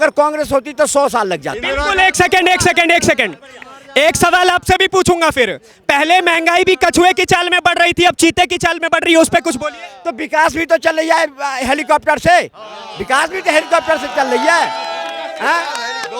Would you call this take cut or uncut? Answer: uncut